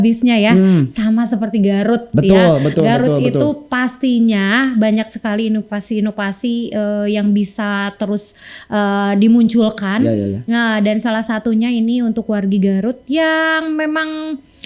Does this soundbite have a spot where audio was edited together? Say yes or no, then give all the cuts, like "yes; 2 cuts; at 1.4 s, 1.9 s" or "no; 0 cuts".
no; 0 cuts